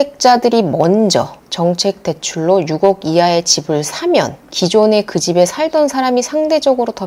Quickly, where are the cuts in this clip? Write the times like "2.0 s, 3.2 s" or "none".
none

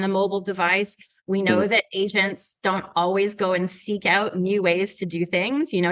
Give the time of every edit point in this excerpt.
none

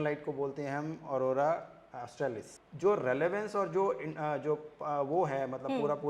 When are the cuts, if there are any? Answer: 2.5 s

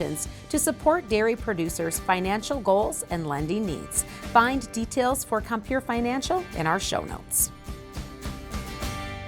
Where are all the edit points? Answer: 7.3 s

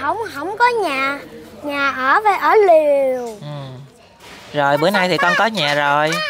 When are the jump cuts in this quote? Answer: none

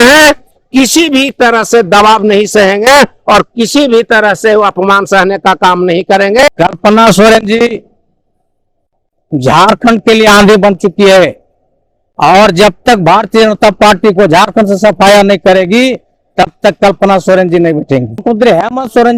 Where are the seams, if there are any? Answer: 6.5 s, 18.2 s

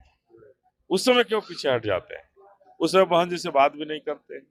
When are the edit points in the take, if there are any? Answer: none

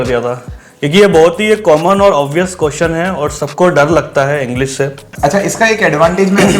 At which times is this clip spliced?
5.0 s

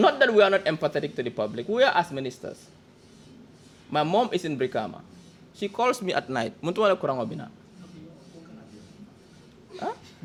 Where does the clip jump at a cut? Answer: none

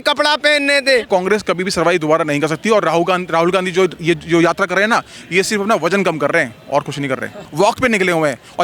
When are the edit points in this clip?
1.1 s, 7.4 s

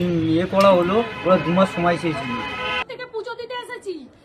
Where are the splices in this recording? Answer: 2.9 s

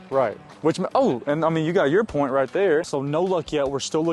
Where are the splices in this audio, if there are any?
2.9 s

